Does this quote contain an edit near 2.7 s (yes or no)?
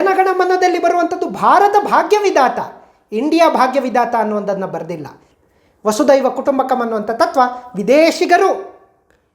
no